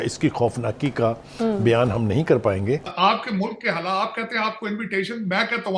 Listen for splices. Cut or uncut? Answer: cut